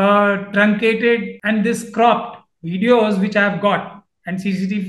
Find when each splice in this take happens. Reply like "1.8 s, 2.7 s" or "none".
1.3 s